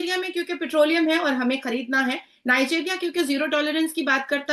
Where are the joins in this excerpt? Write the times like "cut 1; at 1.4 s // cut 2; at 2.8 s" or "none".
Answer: none